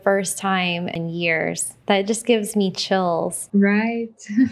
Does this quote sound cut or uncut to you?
cut